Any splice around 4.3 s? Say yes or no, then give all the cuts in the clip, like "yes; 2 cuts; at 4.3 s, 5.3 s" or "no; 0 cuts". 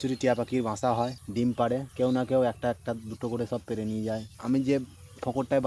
yes; 3 cuts; at 1.2 s, 1.9 s, 4.3 s